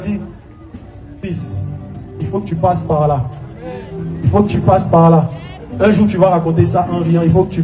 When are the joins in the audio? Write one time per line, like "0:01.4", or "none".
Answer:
none